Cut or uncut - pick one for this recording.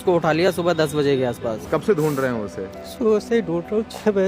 cut